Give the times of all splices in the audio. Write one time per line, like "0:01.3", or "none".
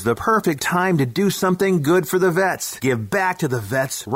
none